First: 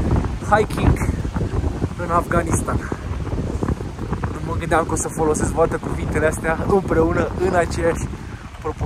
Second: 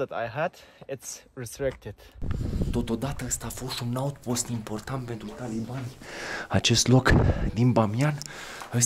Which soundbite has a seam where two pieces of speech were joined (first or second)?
second